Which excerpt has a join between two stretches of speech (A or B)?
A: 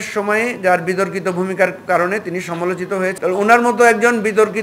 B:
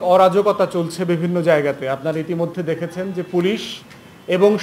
A